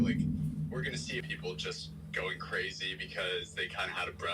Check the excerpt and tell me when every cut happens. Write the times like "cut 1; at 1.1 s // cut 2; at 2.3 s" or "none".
cut 1; at 1.3 s